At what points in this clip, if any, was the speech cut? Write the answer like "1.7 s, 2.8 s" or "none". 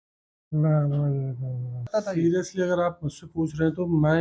1.8 s